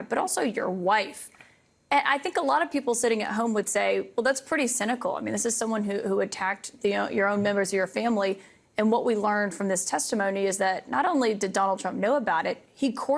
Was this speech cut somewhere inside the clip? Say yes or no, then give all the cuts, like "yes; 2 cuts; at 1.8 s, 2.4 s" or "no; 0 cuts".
yes; 1 cut; at 1.4 s